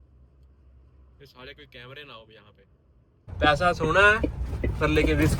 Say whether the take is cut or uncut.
cut